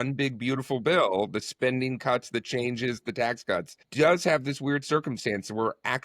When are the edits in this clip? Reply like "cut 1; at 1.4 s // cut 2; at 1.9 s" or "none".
cut 1; at 3.8 s